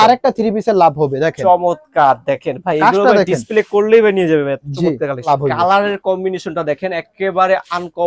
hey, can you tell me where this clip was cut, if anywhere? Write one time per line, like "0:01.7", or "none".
0:05.3